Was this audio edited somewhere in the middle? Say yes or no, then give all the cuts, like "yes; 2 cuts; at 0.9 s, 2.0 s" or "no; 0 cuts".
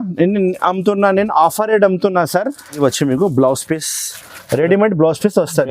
yes; 1 cut; at 2.8 s